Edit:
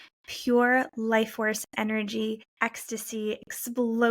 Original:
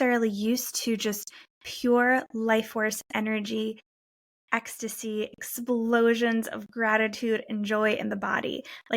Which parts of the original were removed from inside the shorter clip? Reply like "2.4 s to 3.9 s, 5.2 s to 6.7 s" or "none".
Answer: 3.8 s to 4.4 s